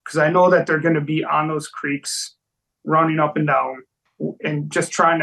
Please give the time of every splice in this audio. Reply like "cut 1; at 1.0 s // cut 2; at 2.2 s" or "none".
cut 1; at 3.9 s